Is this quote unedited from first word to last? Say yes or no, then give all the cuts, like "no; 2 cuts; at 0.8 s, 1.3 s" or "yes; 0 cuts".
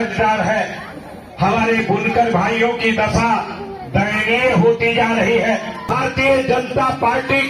no; 1 cut; at 5.9 s